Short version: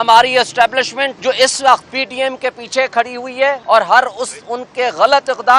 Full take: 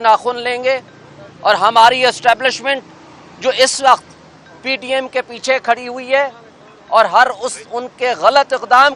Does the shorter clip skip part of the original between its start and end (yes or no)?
yes